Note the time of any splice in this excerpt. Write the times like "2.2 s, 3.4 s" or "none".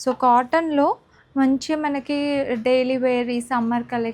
none